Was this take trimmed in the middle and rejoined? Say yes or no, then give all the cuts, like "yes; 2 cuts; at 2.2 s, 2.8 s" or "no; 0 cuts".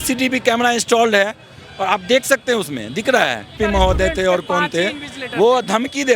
yes; 1 cut; at 3.5 s